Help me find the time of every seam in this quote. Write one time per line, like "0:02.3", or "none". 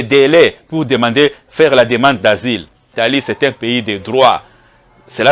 0:02.8